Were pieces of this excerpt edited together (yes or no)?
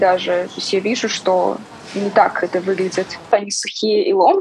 yes